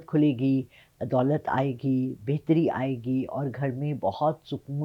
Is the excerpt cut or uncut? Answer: uncut